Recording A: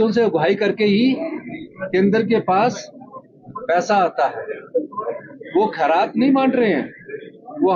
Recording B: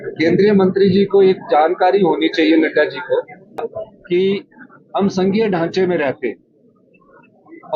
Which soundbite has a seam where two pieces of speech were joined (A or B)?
B